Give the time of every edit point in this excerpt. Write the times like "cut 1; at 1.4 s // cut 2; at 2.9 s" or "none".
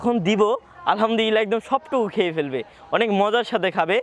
none